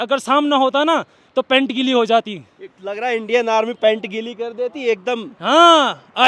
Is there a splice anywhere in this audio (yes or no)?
no